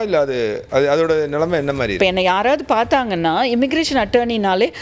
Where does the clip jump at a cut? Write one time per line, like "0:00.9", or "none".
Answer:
0:02.0